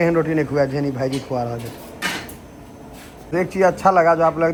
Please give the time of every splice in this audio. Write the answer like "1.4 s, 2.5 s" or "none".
none